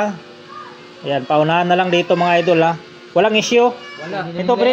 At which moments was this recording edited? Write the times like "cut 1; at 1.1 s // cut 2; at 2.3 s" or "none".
cut 1; at 3.8 s